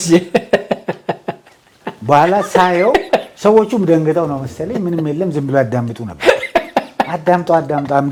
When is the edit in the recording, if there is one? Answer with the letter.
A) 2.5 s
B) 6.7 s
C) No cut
C